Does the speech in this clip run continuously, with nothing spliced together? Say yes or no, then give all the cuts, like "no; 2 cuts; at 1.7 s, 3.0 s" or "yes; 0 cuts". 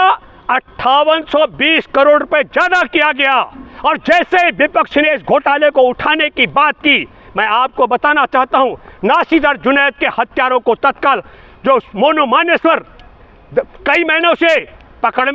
yes; 0 cuts